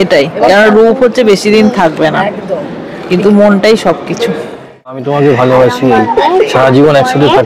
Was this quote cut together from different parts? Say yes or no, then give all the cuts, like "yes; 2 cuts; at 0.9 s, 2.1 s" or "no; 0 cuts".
yes; 1 cut; at 5.0 s